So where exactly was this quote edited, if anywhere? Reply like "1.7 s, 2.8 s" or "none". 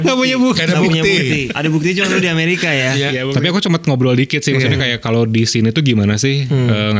1.5 s, 3.3 s